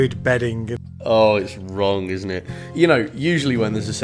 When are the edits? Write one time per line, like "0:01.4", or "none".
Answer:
0:00.9
0:02.6